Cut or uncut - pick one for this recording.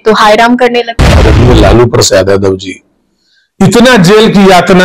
cut